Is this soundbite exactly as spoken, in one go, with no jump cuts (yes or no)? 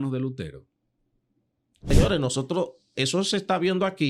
no